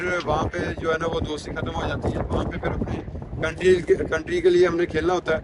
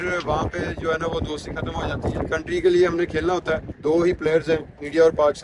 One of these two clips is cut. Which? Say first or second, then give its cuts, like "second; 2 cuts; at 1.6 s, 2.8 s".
second; 2 cuts; at 2.2 s, 3.7 s